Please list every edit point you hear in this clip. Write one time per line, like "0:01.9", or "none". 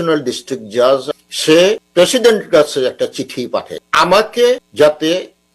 0:01.1
0:01.8
0:03.8
0:04.7